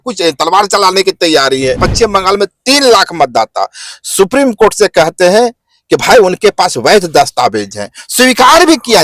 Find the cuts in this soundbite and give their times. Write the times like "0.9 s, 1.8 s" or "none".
1.8 s